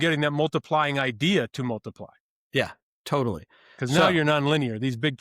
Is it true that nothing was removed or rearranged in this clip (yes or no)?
yes